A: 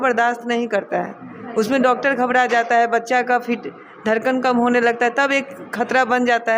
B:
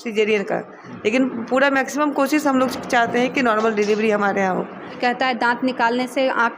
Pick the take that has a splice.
B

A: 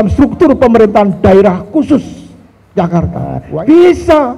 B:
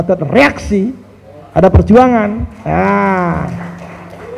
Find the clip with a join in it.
A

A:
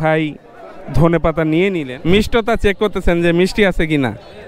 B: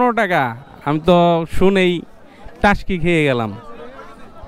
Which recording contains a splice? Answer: A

